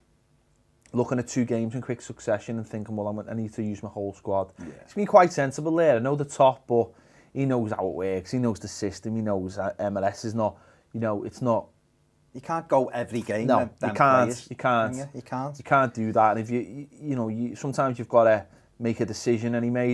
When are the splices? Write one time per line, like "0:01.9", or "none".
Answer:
0:01.5